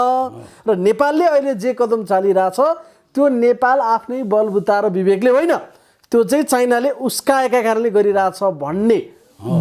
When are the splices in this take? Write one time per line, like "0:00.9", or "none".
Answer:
none